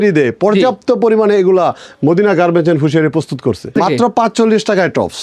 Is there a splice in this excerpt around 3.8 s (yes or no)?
yes